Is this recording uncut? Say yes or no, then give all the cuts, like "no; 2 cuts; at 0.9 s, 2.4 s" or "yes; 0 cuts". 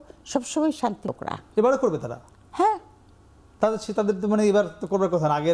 no; 1 cut; at 1.1 s